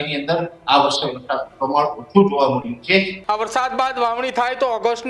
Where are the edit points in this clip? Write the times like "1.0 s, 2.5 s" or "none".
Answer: 3.1 s

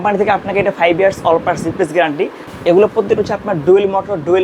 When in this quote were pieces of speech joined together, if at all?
2.4 s

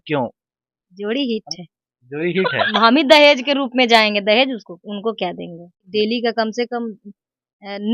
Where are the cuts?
2.7 s, 5.9 s

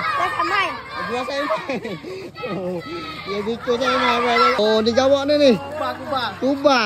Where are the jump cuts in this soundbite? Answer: 4.6 s

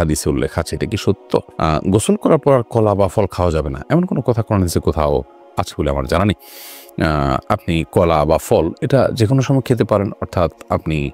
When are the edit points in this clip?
none

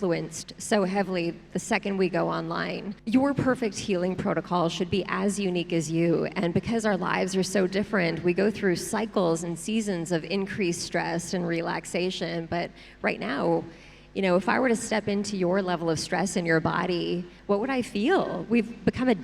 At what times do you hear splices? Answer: 2.9 s

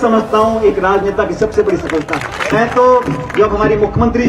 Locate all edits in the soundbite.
2.5 s

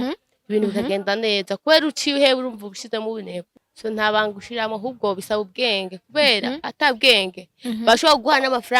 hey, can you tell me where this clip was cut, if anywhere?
3.6 s

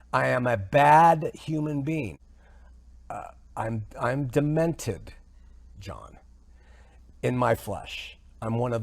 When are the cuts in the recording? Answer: 2.2 s

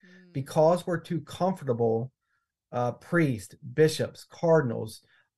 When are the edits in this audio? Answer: none

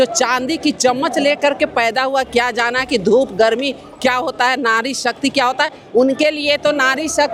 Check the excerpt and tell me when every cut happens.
none

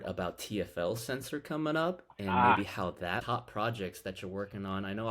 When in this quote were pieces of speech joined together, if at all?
3.2 s

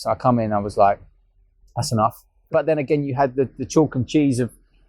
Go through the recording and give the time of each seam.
2.5 s

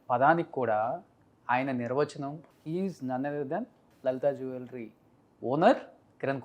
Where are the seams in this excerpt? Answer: 2.4 s, 3.8 s

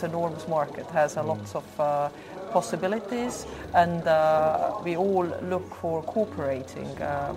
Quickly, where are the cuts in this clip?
none

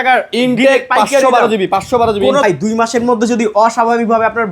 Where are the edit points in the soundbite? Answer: 2.4 s

